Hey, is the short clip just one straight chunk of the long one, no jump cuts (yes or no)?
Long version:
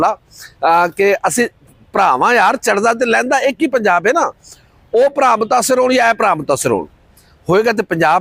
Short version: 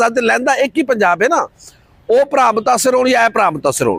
yes